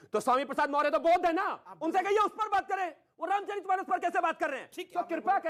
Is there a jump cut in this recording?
no; 0 cuts

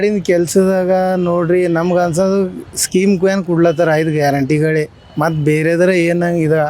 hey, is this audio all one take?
yes; 0 cuts

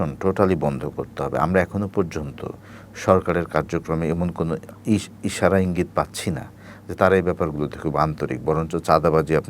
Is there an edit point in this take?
no; 0 cuts

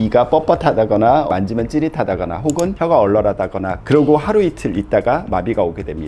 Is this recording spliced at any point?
yes; 2 cuts; at 1.3 s, 3.8 s

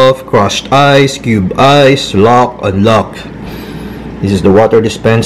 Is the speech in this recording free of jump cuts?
yes; 0 cuts

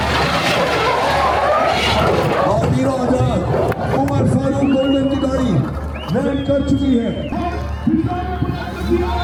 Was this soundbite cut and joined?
no; 0 cuts

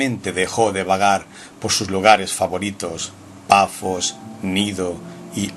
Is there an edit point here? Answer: yes; 1 cut; at 4.2 s

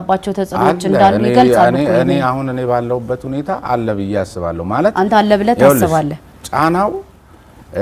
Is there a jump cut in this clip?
no; 0 cuts

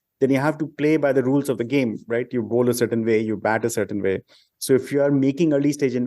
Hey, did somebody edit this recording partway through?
no; 0 cuts

